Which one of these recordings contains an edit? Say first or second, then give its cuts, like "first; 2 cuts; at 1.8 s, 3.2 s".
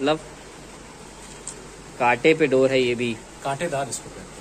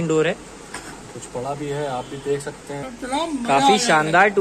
second; 1 cut; at 2.9 s